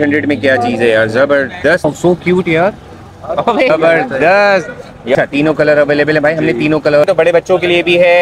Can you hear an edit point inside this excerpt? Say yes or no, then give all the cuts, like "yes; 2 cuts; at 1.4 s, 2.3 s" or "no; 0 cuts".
yes; 4 cuts; at 1.9 s, 3.7 s, 5.2 s, 7.0 s